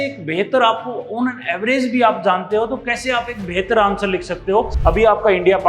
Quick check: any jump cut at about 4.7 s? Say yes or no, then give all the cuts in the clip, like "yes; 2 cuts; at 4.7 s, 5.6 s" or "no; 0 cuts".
yes; 1 cut; at 4.7 s